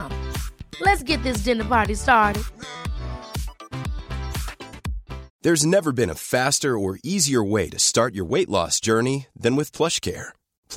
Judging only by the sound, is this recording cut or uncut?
cut